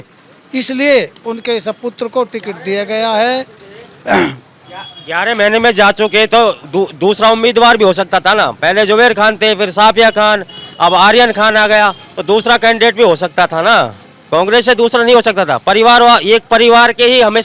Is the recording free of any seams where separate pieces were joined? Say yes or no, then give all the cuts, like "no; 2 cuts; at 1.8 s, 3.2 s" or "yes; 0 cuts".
yes; 0 cuts